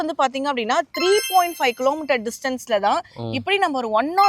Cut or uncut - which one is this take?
uncut